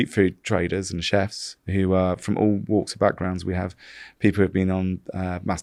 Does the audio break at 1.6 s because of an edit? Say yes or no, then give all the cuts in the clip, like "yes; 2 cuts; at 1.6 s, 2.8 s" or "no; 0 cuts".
no; 0 cuts